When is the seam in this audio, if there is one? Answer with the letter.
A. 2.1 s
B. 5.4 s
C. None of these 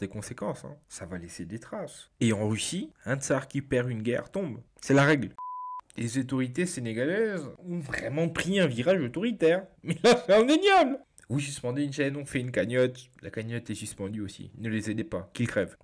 B